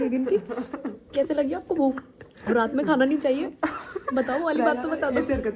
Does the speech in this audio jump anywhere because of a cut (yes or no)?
no